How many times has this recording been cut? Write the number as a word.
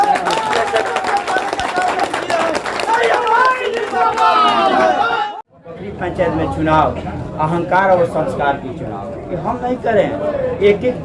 one